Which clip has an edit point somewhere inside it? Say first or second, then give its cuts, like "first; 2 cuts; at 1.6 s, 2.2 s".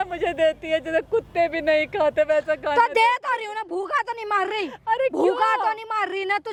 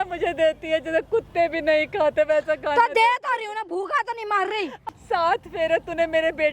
second; 1 cut; at 4.8 s